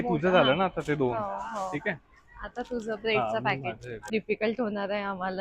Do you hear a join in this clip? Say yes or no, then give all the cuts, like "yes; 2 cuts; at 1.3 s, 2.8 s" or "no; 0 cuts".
yes; 1 cut; at 4.1 s